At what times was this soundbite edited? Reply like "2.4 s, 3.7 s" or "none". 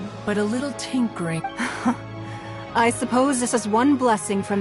1.4 s

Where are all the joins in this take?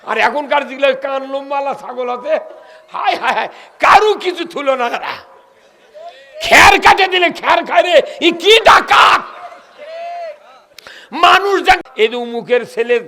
11.9 s

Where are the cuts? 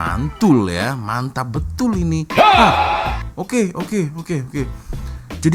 none

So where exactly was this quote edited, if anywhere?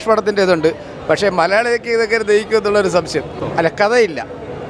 3.4 s

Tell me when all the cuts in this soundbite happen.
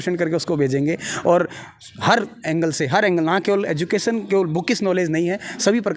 none

